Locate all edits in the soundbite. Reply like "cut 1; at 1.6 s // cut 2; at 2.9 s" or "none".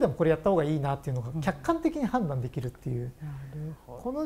none